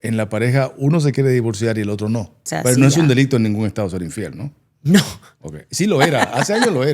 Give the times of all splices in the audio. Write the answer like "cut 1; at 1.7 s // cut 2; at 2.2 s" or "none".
cut 1; at 2.4 s